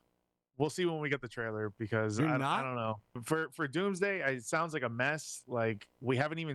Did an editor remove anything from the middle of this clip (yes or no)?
yes